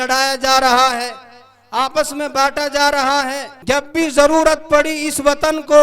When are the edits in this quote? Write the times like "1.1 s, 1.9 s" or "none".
3.5 s

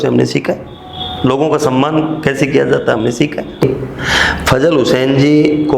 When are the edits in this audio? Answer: none

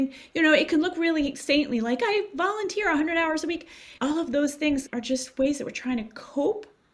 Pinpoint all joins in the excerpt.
4.9 s

